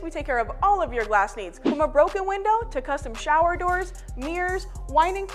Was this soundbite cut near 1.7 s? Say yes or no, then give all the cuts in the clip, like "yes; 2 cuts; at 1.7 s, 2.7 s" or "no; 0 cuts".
yes; 3 cuts; at 1.7 s, 2.7 s, 4.4 s